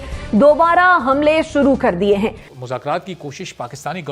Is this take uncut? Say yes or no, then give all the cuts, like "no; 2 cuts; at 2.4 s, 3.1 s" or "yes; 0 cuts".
no; 1 cut; at 2.5 s